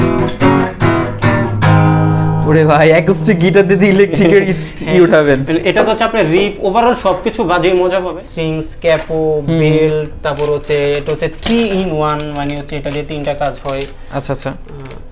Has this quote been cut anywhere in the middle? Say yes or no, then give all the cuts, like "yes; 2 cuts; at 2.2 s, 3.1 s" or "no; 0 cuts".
yes; 1 cut; at 8.2 s